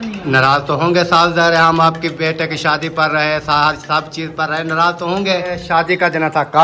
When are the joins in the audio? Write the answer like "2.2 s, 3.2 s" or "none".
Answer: 5.6 s

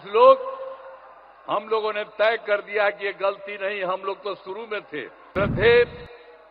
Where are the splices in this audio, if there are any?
5.2 s

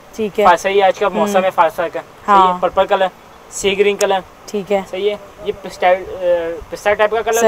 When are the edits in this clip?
none

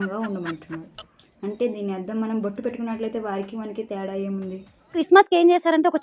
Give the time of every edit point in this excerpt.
5.0 s

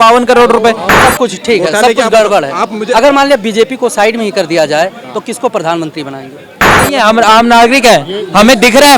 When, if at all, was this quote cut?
1.0 s, 6.8 s

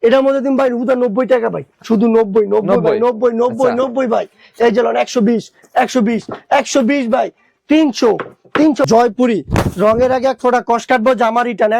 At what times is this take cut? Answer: 8.9 s

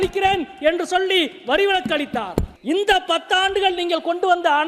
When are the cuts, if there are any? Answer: 2.5 s

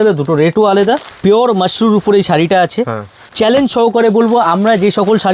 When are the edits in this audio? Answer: 1.1 s, 3.2 s

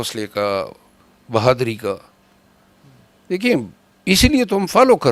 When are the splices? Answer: none

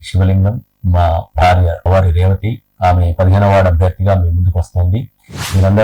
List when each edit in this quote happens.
1.9 s

